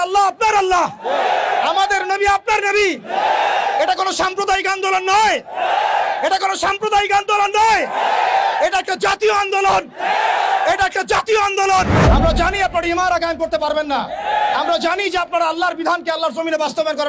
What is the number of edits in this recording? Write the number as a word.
one